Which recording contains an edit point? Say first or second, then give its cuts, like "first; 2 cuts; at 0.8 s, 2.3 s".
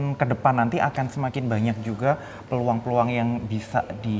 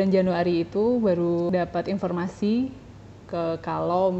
second; 1 cut; at 1.5 s